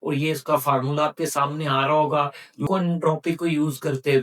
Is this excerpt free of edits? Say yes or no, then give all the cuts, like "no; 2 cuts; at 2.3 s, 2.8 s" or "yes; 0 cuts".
no; 1 cut; at 2.6 s